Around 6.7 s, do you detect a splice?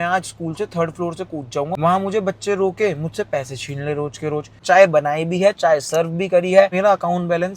yes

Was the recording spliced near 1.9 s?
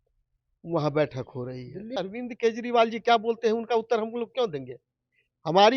yes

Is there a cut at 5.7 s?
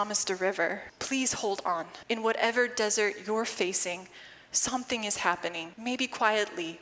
yes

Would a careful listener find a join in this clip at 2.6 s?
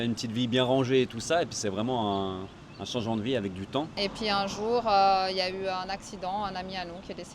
no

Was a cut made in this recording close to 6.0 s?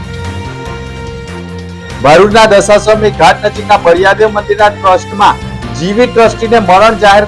no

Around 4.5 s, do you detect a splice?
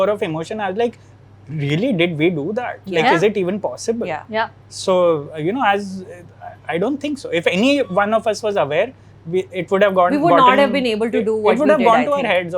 no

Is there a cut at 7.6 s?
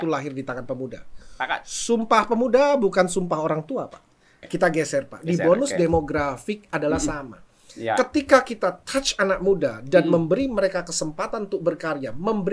no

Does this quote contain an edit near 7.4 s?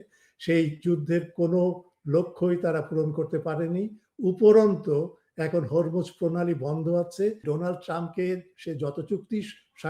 yes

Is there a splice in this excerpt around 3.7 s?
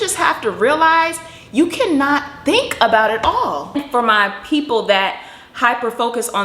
yes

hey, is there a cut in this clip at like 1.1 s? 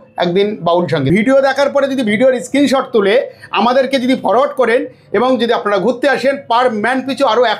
yes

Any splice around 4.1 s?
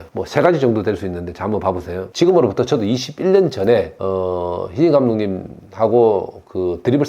no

